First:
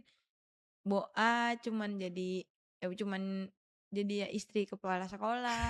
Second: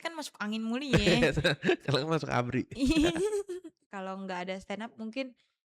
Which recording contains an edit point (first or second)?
second